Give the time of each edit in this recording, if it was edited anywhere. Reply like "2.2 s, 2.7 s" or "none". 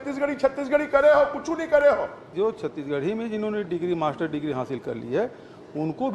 2.2 s